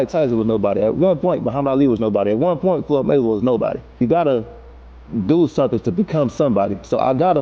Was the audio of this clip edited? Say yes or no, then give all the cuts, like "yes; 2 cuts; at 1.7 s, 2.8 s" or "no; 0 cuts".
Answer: yes; 1 cut; at 4.0 s